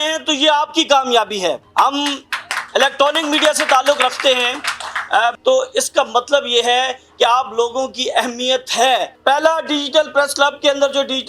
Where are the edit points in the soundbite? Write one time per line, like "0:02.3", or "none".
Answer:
0:01.6
0:05.4
0:09.1